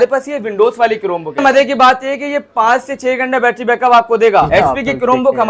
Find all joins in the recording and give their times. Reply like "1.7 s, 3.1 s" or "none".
1.4 s, 4.5 s